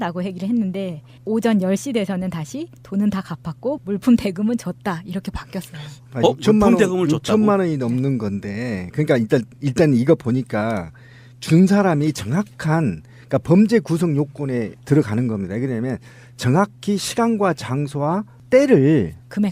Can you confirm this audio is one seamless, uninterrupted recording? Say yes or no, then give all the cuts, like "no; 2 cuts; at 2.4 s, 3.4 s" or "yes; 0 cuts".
yes; 0 cuts